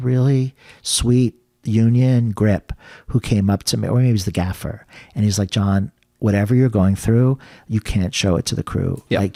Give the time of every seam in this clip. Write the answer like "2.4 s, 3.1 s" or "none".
none